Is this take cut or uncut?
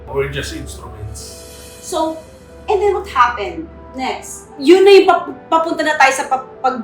cut